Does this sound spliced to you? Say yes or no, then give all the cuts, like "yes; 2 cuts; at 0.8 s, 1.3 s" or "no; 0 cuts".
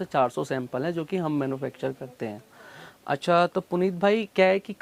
no; 0 cuts